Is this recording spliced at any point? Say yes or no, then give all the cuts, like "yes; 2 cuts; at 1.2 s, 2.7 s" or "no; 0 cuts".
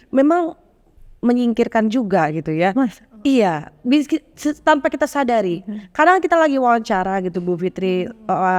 no; 0 cuts